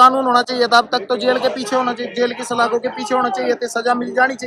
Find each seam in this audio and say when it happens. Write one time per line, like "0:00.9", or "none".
none